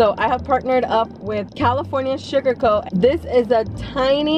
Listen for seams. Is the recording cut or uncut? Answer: cut